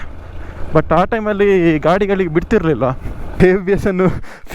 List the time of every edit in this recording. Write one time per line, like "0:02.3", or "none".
0:03.2